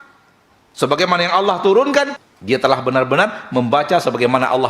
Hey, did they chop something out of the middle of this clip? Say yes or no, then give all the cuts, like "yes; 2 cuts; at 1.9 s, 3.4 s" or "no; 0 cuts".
yes; 1 cut; at 2.2 s